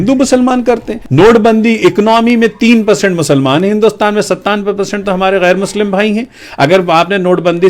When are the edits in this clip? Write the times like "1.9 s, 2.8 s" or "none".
1.0 s